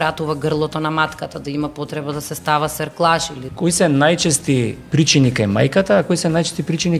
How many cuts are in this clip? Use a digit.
2